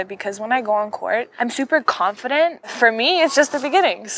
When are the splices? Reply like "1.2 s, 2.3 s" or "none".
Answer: 1.3 s, 2.6 s